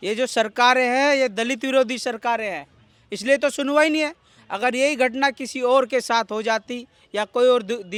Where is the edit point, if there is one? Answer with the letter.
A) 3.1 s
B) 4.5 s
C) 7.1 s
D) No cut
D